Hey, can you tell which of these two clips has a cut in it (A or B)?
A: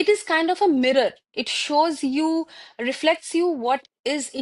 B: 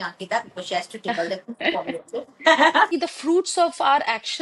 B